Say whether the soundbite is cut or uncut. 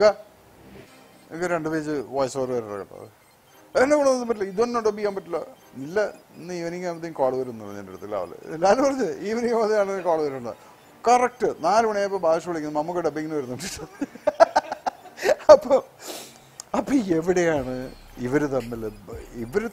cut